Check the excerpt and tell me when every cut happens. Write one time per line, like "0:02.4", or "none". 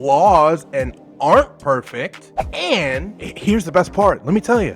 0:03.2